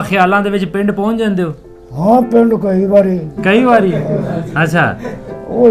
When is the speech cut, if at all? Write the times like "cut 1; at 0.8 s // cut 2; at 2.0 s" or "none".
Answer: none